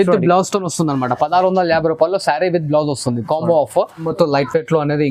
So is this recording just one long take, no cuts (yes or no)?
no